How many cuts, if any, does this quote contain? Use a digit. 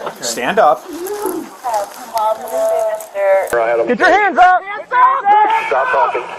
1